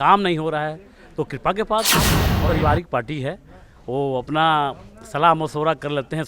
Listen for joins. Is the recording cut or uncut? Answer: cut